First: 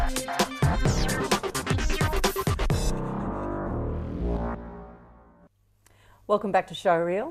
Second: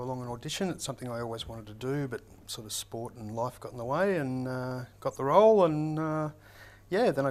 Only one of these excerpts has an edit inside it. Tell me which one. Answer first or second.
first